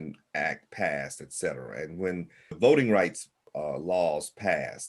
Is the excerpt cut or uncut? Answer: cut